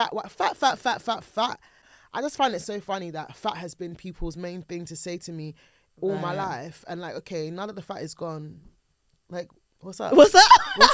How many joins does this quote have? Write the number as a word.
one